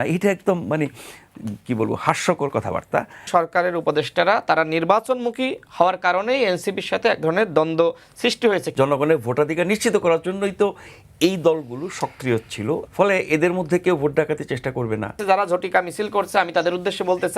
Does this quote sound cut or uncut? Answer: cut